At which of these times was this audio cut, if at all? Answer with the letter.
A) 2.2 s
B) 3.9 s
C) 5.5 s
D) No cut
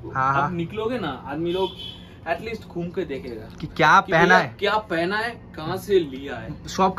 D